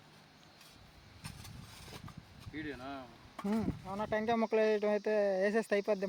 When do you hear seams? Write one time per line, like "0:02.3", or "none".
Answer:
none